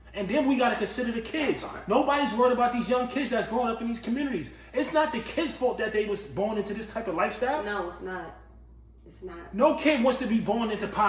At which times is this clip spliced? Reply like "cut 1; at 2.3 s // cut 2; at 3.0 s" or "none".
none